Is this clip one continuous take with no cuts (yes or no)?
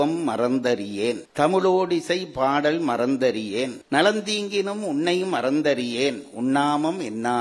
yes